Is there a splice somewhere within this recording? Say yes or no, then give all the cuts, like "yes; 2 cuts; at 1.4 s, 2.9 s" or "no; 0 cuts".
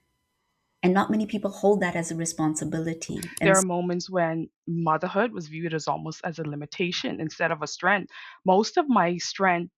yes; 1 cut; at 3.4 s